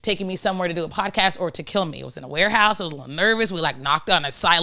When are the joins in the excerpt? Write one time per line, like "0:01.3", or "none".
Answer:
none